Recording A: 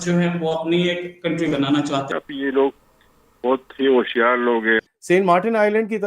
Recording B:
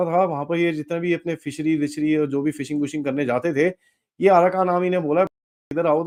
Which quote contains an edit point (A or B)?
A